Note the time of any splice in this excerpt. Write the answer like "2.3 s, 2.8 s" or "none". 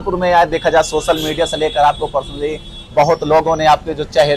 none